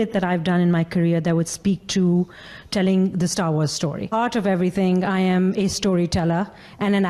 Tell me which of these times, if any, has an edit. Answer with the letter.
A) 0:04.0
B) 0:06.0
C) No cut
A